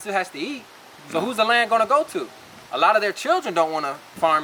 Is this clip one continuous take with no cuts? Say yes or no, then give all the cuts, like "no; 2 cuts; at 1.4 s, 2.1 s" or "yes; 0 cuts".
yes; 0 cuts